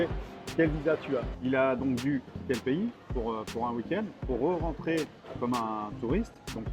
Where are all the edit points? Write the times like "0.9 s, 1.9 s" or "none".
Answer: 1.3 s, 2.4 s